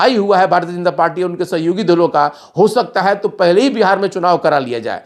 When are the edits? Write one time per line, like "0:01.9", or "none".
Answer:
none